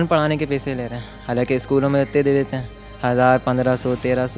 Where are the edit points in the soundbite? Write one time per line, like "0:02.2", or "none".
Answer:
none